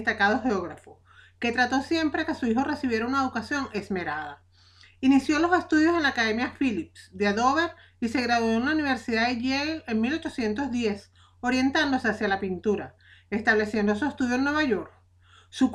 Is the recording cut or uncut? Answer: uncut